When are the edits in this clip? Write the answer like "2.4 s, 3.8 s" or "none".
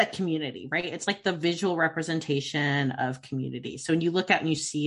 none